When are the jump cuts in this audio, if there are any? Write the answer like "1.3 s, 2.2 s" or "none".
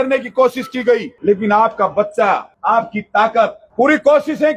1.1 s, 2.5 s, 3.6 s